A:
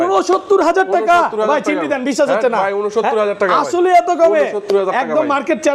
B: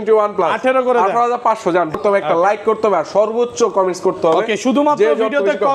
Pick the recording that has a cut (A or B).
B